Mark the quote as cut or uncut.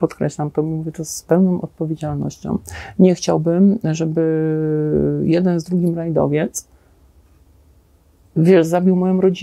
uncut